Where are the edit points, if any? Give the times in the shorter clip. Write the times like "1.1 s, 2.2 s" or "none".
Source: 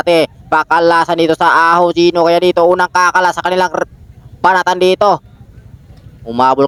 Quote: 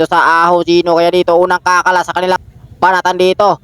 2.4 s